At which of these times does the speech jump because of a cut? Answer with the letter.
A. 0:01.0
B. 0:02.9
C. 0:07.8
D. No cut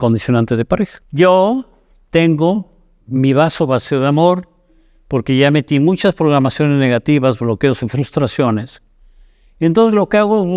A